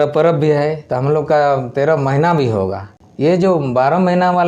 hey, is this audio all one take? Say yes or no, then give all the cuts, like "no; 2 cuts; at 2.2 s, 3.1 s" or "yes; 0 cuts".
no; 1 cut; at 2.9 s